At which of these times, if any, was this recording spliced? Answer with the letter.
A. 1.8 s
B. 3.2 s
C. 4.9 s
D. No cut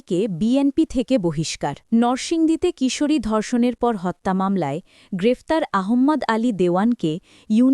A